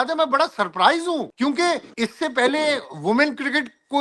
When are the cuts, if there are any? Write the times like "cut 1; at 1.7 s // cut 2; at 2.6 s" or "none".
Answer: cut 1; at 1.3 s // cut 2; at 1.9 s